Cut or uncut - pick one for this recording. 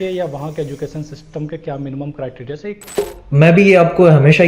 cut